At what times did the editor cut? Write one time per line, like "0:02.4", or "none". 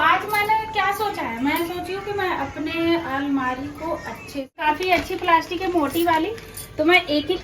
0:04.5